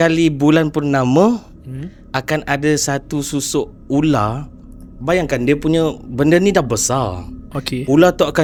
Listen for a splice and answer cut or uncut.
uncut